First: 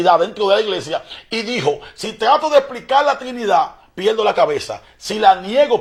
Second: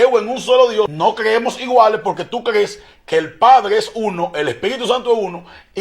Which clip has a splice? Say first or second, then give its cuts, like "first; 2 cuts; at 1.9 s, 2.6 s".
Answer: second; 1 cut; at 0.9 s